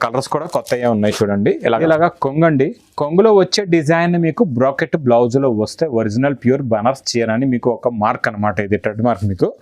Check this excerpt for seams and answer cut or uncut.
cut